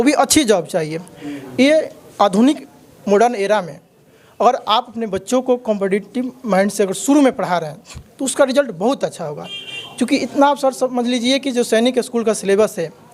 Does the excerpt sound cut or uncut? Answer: uncut